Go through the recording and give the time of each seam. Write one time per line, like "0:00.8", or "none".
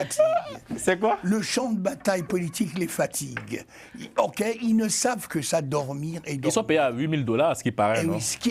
none

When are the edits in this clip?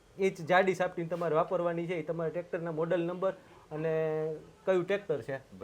none

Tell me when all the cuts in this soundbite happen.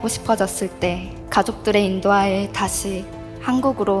0:01.1

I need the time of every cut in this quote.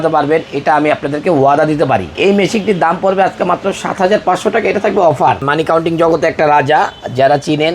0:02.1
0:05.4

